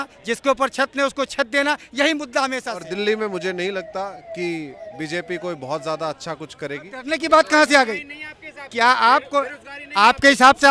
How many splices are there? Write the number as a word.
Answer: two